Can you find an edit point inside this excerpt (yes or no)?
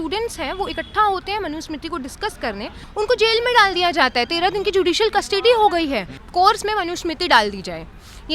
yes